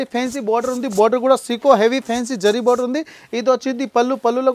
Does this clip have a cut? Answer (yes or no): no